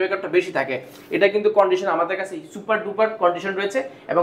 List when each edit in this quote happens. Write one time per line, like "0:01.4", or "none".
none

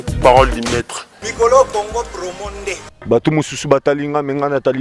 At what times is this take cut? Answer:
0:02.9

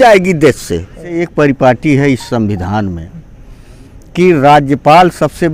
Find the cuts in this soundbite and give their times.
0:01.2

